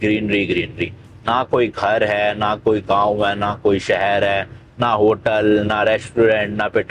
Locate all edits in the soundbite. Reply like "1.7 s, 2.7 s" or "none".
none